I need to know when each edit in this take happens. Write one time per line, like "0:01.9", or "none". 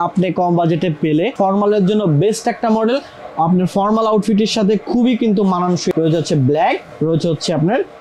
0:01.3
0:05.9